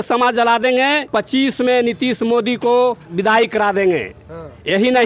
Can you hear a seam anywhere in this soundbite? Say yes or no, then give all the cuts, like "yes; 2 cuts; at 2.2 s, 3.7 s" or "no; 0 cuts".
yes; 1 cut; at 3.1 s